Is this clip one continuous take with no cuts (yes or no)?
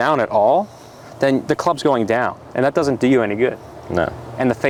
yes